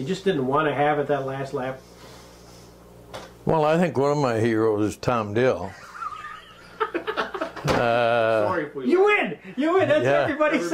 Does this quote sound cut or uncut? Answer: uncut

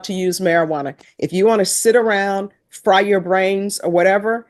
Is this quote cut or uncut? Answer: uncut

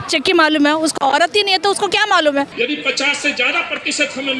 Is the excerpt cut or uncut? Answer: cut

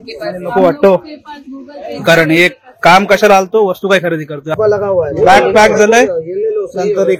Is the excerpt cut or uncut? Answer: cut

